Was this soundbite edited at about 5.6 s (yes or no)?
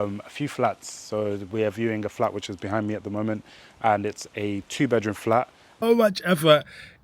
yes